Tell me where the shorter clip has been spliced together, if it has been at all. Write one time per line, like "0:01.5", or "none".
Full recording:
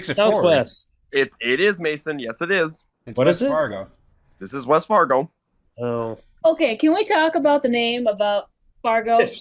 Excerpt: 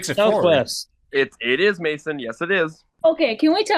0:02.8